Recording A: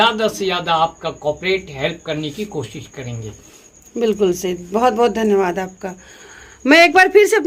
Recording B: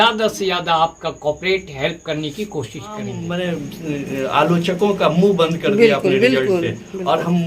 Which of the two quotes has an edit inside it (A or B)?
B